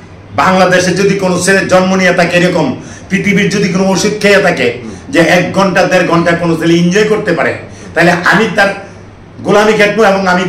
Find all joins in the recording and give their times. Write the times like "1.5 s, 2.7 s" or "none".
none